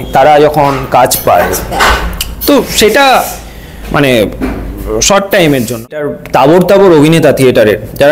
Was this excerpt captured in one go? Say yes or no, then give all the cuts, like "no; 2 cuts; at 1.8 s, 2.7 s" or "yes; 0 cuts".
no; 1 cut; at 6.0 s